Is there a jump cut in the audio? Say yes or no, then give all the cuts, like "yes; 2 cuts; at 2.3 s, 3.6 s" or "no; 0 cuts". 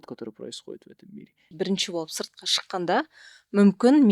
yes; 1 cut; at 1.5 s